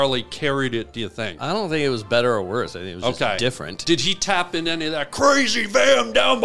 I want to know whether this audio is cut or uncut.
cut